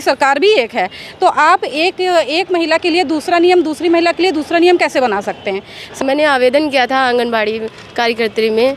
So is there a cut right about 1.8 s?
no; 1 cut; at 6.0 s

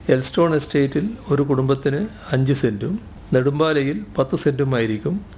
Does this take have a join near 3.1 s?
yes; 1 cut; at 3.1 s

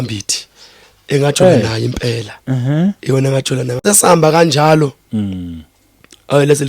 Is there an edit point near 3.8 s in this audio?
yes; 1 cut; at 3.8 s

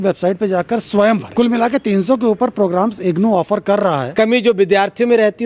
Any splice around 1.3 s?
yes; 2 cuts; at 1.3 s, 4.1 s

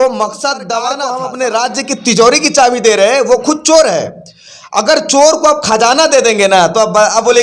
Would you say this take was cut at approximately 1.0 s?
yes; 1 cut; at 1.0 s

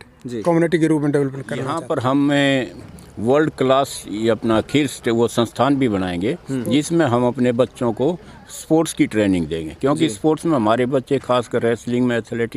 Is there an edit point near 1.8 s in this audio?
yes; 1 cut; at 1.8 s

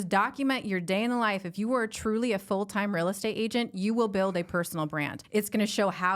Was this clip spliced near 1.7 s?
no; 1 cut; at 5.2 s

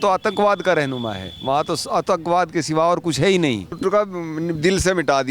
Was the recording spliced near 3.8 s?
yes; 1 cut; at 3.8 s

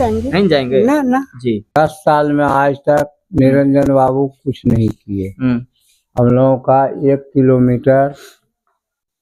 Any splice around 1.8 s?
yes; 1 cut; at 1.8 s

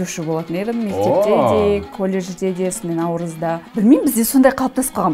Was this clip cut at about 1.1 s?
no; 1 cut; at 3.6 s

